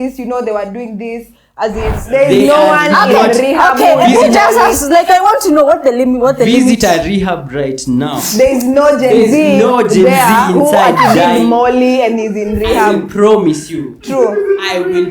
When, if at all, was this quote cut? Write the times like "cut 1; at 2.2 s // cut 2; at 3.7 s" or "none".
cut 1; at 2.0 s